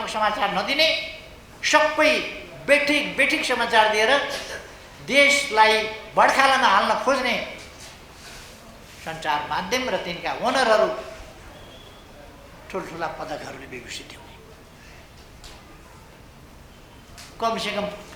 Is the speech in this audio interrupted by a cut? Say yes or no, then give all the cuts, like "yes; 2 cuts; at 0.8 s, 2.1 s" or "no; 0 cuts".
no; 0 cuts